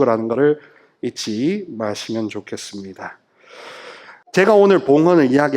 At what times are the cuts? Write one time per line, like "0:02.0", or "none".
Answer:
0:04.1